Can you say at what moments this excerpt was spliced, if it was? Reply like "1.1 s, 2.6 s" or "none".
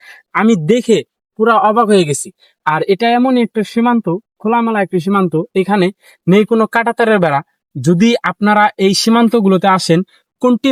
none

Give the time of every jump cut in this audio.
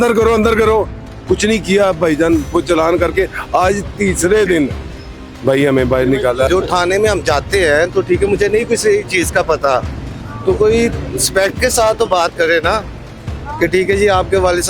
6.5 s

